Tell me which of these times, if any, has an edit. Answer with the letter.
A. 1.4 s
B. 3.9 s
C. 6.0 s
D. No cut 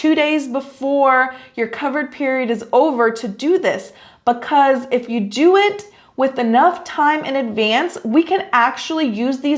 D